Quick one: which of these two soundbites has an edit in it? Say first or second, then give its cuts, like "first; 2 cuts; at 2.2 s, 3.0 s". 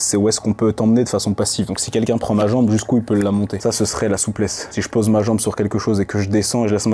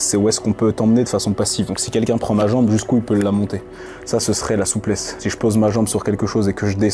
first; 1 cut; at 3.5 s